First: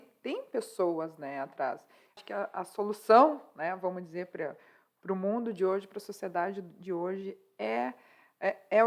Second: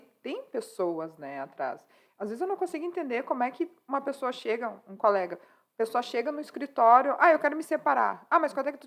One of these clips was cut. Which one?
first; 1 cut; at 2.2 s

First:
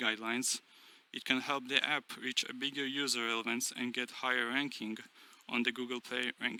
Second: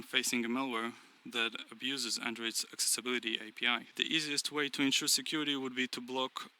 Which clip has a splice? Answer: second; 1 cut; at 3.9 s

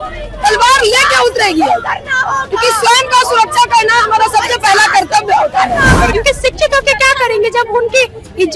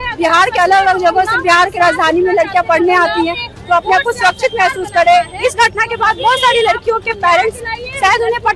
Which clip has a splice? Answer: first; 1 cut; at 6.1 s

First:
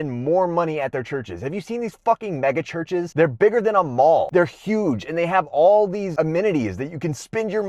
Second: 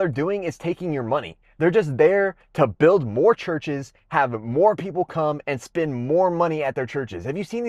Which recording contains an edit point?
first; 3 cuts; at 3.1 s, 4.3 s, 6.1 s

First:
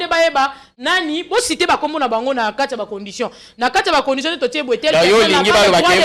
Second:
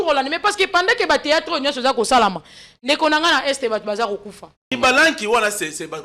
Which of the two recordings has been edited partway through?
second; 1 cut; at 4.7 s

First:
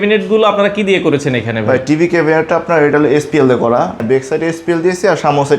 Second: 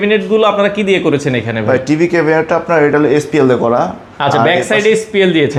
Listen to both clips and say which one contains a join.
first; 1 cut; at 4.0 s

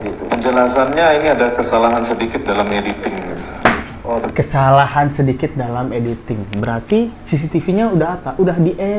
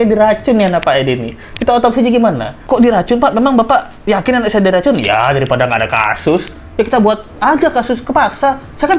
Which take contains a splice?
second; 1 cut; at 6.6 s

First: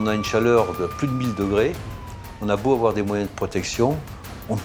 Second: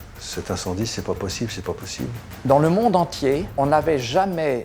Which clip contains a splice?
second; 2 cuts; at 2.2 s, 3.5 s

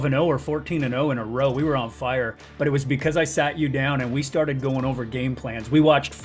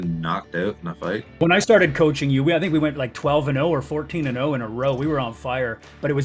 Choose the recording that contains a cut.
second; 1 cut; at 1.4 s

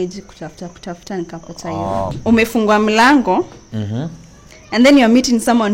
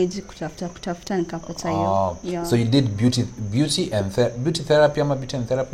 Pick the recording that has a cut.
first; 1 cut; at 2.2 s

